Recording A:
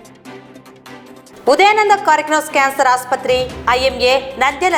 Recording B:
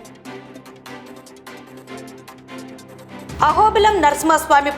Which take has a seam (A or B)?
B